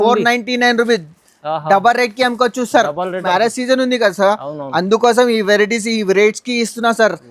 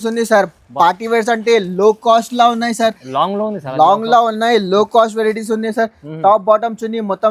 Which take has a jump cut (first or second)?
first